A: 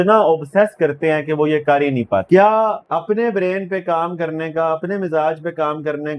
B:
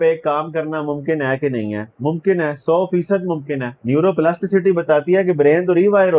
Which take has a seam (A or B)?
A